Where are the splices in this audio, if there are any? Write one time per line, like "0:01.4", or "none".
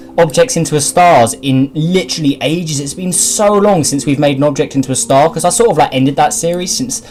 none